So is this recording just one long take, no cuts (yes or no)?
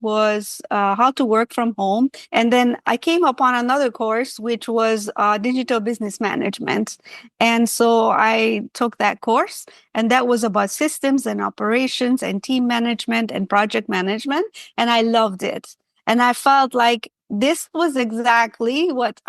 no